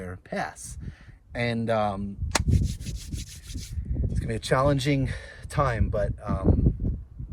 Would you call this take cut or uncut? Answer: uncut